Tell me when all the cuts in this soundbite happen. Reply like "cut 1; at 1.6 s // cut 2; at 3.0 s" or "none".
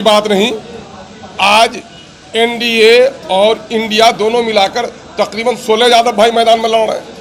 none